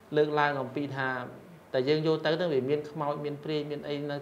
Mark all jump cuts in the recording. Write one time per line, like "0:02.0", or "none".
none